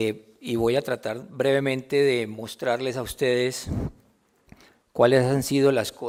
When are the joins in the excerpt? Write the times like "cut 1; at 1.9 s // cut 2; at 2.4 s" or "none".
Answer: none